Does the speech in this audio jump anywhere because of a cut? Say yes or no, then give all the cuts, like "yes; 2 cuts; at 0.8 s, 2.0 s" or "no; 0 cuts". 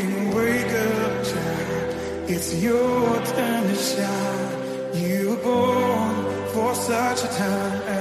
no; 0 cuts